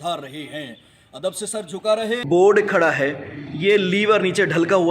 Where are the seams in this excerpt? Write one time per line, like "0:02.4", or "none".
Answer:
0:02.2